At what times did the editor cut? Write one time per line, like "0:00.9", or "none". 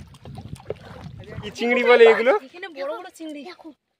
0:01.5

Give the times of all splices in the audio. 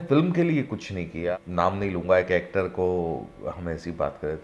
0:01.2

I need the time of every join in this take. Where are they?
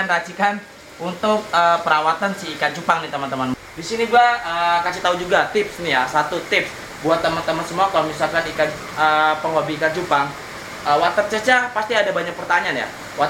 0:03.5

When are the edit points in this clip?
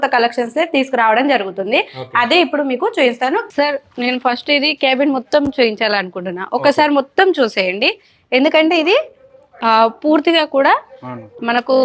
0:03.5

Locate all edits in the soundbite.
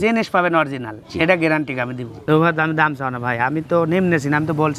0:02.2

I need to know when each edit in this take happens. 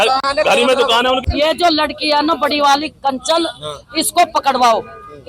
0:01.3

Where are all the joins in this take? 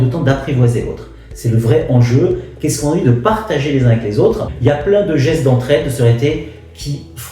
0:04.5

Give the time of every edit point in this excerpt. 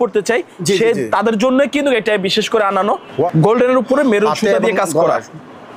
0:03.3

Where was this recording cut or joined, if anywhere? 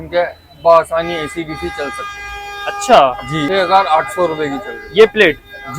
0:03.4

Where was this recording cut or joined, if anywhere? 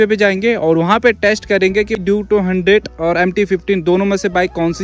0:02.0

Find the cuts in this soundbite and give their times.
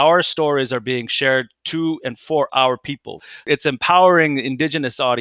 0:03.4

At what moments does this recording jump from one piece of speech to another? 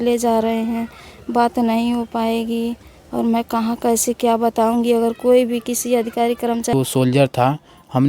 0:06.7

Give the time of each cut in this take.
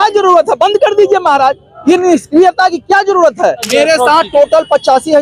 0:03.6

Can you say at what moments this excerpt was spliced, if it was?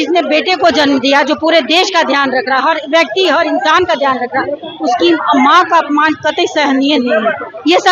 none

